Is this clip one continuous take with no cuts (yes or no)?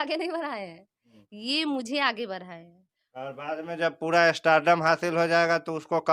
yes